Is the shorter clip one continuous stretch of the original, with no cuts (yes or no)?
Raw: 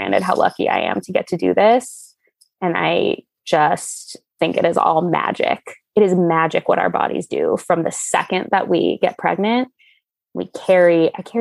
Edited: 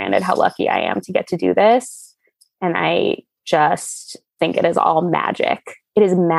yes